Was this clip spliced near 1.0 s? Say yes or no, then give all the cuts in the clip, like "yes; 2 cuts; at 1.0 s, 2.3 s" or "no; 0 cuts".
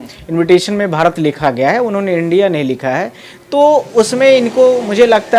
no; 0 cuts